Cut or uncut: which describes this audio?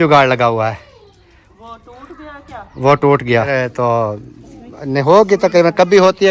cut